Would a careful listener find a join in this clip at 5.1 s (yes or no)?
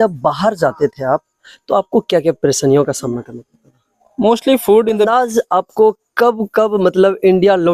yes